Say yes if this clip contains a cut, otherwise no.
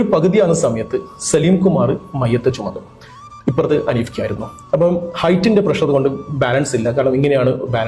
no